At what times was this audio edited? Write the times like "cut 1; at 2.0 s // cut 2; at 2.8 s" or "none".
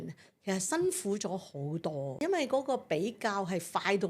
cut 1; at 2.2 s